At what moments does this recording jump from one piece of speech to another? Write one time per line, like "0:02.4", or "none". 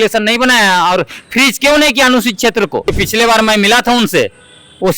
0:02.9